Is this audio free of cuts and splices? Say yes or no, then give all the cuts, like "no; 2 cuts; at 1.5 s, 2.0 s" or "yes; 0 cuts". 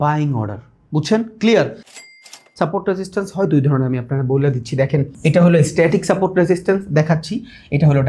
no; 2 cuts; at 2.0 s, 5.1 s